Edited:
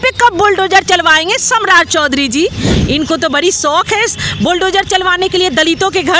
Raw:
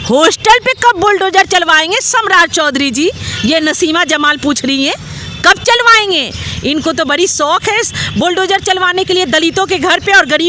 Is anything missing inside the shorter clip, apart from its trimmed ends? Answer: yes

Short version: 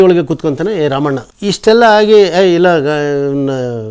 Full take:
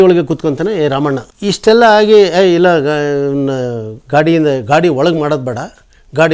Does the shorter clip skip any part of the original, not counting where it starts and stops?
no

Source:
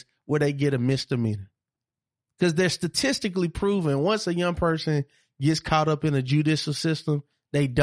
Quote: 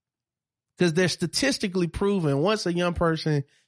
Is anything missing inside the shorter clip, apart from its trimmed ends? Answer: no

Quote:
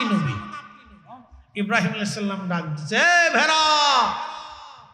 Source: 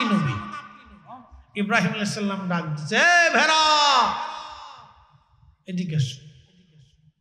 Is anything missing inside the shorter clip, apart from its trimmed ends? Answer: no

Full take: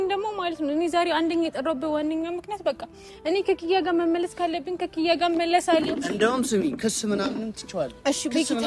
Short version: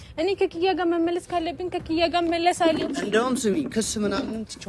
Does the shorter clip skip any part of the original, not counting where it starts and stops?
no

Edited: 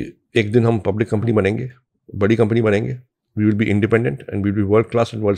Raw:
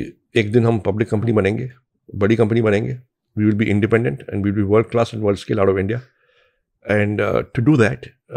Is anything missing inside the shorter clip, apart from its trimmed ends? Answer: no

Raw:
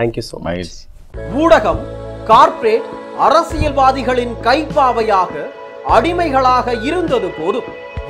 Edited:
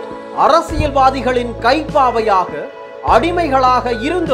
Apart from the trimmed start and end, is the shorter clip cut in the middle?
no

